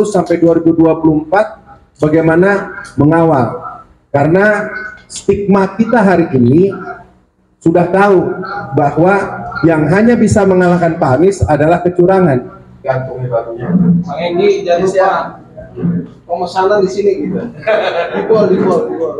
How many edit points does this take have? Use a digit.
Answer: 1